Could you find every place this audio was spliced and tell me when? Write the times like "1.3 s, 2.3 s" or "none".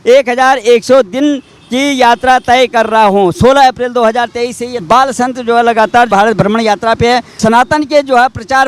4.8 s, 6.1 s